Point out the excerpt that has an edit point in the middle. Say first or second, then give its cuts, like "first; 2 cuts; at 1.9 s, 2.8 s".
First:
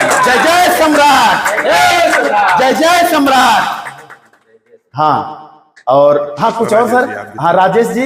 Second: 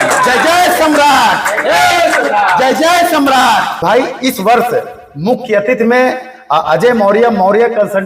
second; 1 cut; at 3.8 s